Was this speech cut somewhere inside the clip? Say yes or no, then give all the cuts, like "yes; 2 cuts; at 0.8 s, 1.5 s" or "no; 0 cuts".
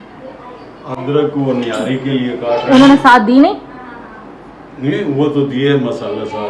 no; 0 cuts